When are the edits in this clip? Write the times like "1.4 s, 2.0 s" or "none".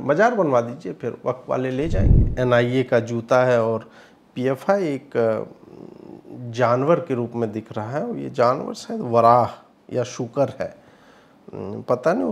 2.2 s